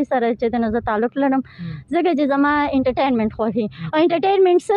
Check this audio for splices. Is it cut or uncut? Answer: uncut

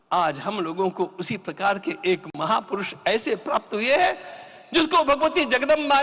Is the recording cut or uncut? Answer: uncut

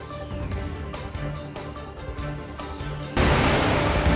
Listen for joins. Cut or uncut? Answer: cut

